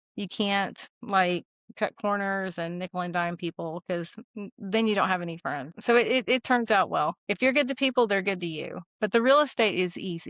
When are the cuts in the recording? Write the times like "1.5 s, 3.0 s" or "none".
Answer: 5.7 s, 7.2 s